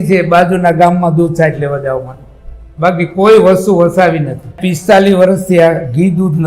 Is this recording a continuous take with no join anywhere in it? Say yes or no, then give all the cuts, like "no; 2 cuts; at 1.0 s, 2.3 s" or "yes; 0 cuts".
no; 1 cut; at 4.7 s